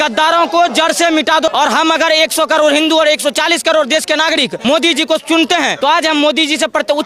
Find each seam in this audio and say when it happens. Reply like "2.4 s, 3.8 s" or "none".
1.5 s, 4.5 s, 5.7 s